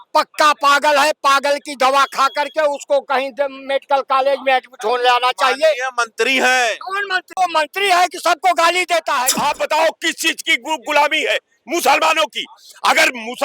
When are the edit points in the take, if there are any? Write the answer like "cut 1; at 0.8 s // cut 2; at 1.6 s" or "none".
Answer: cut 1; at 7.4 s // cut 2; at 9.3 s

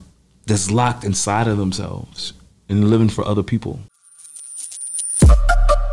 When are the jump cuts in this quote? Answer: cut 1; at 4.1 s

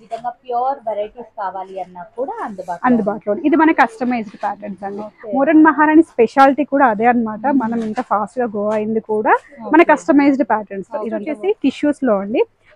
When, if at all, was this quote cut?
cut 1; at 11.2 s

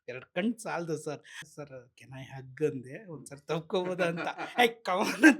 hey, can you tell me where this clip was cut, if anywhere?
cut 1; at 1.4 s

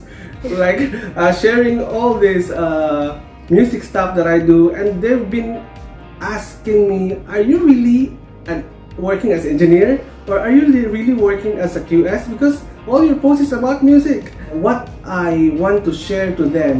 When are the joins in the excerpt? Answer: cut 1; at 14.5 s

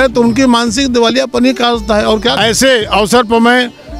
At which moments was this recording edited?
cut 1; at 2.4 s

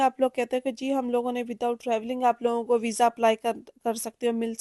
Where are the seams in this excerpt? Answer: none

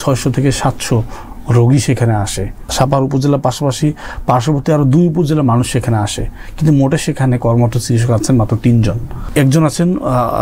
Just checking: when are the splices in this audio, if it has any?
cut 1; at 2.7 s // cut 2; at 9.2 s

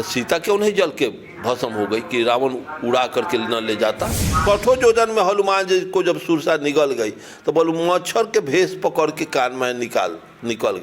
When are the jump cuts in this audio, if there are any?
cut 1; at 4.4 s

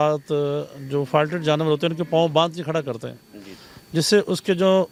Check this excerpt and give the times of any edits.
none

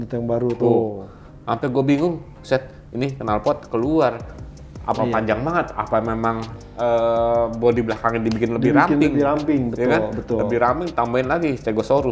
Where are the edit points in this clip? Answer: none

